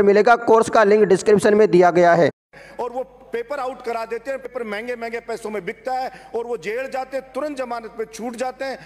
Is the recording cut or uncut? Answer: cut